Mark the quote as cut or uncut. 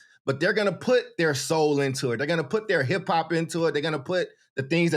uncut